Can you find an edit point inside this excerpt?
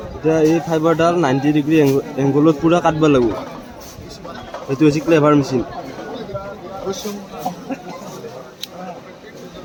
no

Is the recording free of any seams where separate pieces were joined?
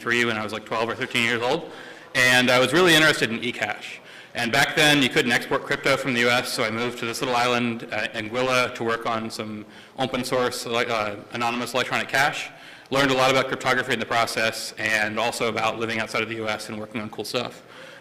no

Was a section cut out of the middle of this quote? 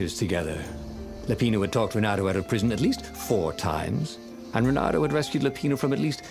no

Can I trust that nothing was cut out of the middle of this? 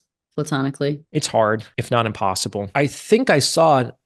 no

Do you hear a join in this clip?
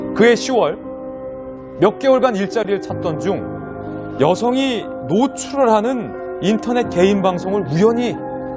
yes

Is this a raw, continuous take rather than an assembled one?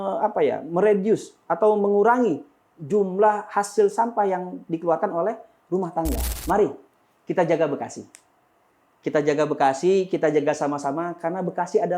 no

